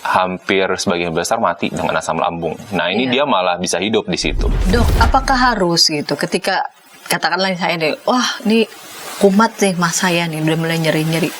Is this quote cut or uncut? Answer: cut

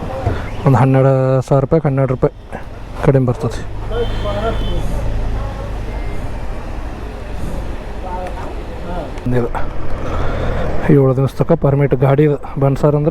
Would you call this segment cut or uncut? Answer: cut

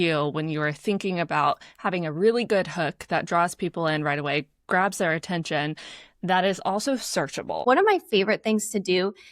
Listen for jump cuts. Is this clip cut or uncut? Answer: cut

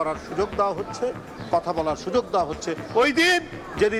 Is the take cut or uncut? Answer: uncut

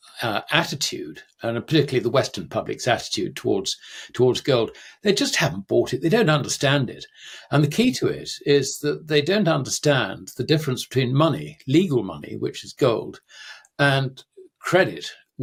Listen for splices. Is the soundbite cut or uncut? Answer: uncut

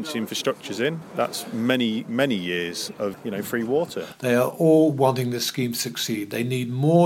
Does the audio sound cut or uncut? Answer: cut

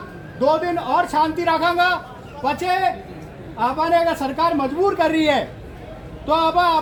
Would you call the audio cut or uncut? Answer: uncut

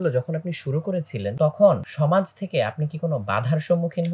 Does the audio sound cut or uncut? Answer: cut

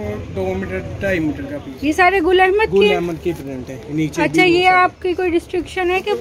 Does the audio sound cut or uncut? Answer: cut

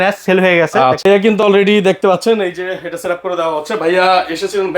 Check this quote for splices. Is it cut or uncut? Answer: cut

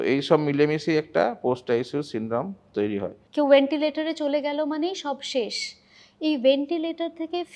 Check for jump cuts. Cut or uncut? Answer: cut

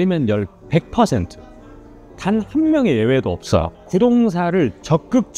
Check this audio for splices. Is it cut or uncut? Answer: uncut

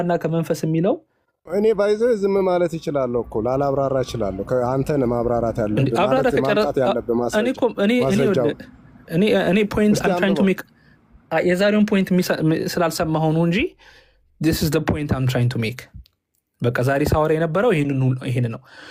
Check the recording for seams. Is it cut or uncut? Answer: uncut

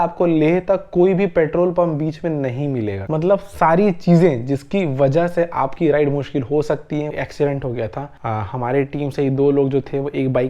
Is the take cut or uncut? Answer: cut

